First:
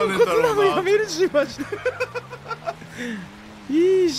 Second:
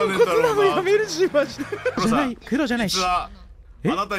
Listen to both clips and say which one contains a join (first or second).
second